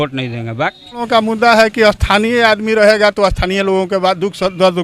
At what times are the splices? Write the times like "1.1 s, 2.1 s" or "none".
1.1 s